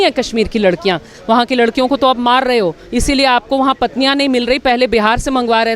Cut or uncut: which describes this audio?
cut